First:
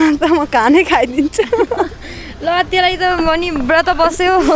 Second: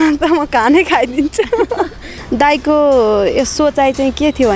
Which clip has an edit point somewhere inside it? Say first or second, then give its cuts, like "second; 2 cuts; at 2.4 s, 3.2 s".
second; 1 cut; at 2.2 s